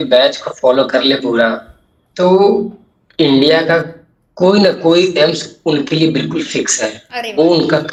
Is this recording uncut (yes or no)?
yes